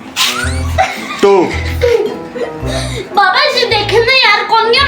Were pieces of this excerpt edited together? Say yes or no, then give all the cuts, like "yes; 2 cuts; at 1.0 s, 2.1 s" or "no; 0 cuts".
no; 0 cuts